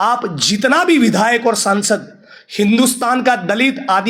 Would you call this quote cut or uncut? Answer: uncut